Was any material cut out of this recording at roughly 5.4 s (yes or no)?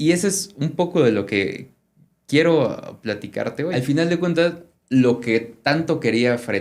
no